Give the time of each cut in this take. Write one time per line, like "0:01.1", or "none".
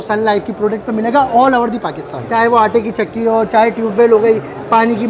0:02.2